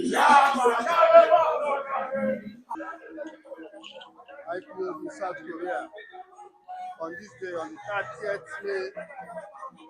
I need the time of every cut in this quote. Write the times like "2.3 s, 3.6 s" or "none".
2.7 s